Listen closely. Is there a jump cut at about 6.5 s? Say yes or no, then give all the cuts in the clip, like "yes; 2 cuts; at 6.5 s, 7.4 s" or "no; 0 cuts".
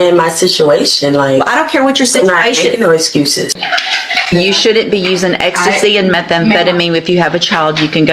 no; 1 cut; at 3.6 s